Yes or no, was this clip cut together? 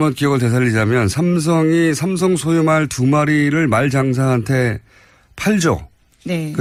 no